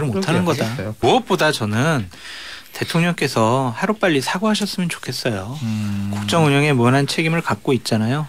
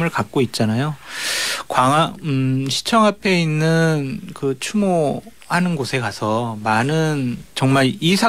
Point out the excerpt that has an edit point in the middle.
first; 1 cut; at 1.0 s

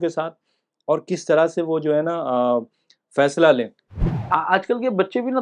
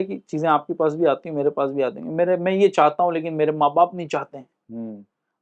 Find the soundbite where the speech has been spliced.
first; 1 cut; at 4.1 s

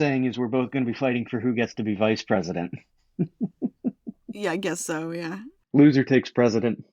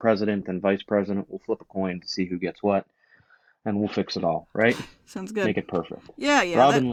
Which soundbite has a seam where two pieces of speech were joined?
first; 1 cut; at 5.6 s

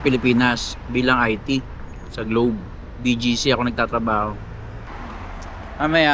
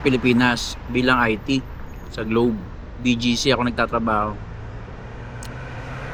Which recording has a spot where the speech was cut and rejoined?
first; 1 cut; at 4.9 s

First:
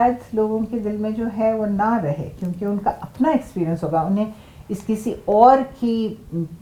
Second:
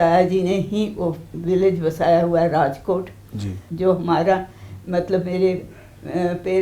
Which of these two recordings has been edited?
second; 1 cut; at 3.6 s

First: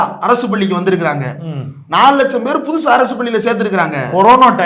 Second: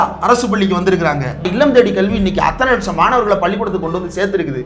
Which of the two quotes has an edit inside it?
second; 1 cut; at 1.5 s

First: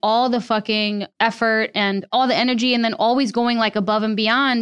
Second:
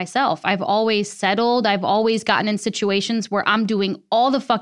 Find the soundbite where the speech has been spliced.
first; 1 cut; at 2.1 s

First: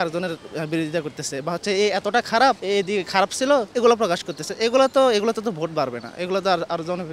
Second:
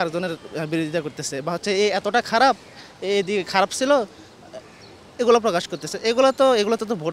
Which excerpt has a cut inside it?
first; 2 cuts; at 2.6 s, 3.7 s

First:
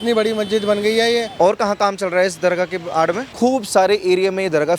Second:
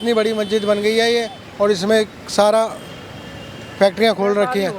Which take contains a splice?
first; 2 cuts; at 1.3 s, 3.3 s

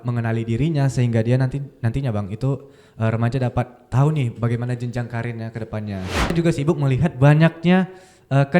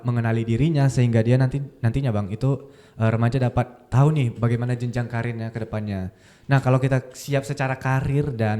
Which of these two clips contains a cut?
first; 1 cut; at 6.3 s

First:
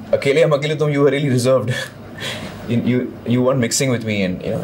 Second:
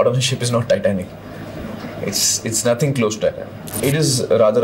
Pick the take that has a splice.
second; 1 cut; at 3.6 s

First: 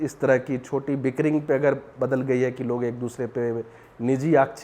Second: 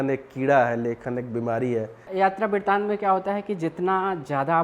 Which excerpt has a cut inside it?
second; 1 cut; at 2.0 s

